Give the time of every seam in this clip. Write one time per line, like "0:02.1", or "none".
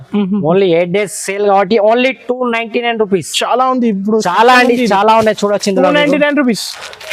none